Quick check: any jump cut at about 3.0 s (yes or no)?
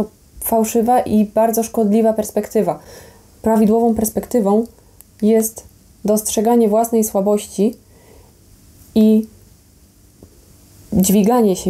no